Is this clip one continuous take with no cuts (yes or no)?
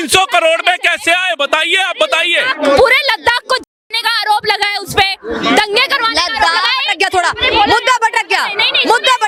yes